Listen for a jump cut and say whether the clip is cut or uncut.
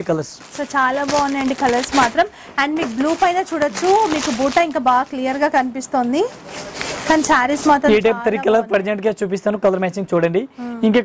uncut